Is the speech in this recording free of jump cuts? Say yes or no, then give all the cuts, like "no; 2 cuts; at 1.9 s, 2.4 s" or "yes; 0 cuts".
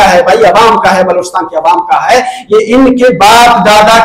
yes; 0 cuts